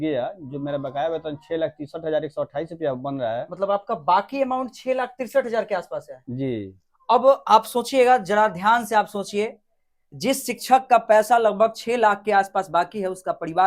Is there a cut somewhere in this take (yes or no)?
no